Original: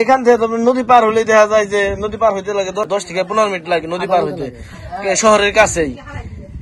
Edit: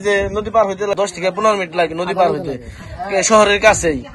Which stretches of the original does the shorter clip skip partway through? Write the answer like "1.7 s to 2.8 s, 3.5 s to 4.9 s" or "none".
2.6 s to 2.9 s